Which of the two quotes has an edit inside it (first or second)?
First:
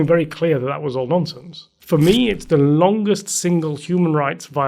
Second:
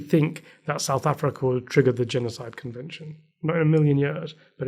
first